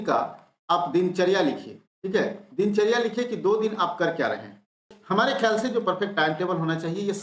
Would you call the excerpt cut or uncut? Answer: cut